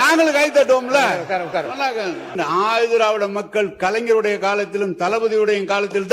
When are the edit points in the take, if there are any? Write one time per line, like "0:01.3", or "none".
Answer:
0:02.4